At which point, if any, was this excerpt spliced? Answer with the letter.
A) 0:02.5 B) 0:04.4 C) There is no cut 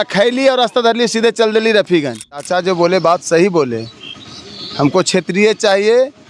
A